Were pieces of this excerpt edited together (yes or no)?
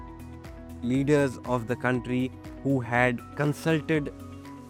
no